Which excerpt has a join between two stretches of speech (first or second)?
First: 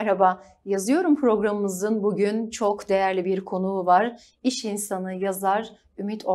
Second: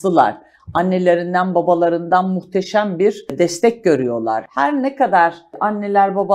second